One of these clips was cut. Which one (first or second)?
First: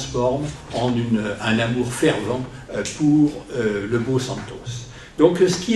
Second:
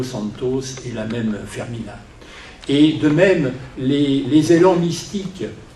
first